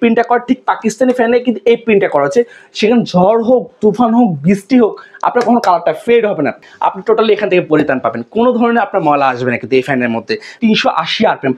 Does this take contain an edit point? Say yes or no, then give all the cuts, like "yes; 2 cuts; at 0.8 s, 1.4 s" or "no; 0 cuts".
yes; 2 cuts; at 6.6 s, 10.5 s